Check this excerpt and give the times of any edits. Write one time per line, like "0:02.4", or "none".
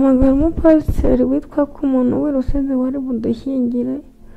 none